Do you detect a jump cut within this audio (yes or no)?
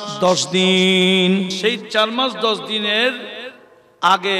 yes